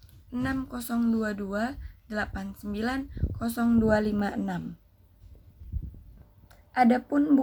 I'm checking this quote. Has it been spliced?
no; 0 cuts

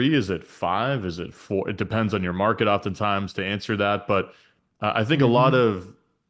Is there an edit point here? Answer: no; 0 cuts

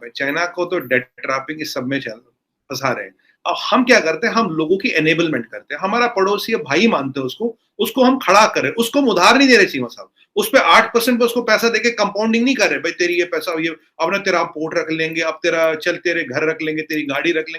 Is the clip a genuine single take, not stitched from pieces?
yes; 0 cuts

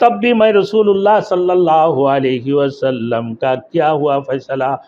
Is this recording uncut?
yes; 0 cuts

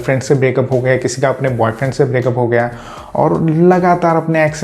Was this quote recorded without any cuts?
yes; 0 cuts

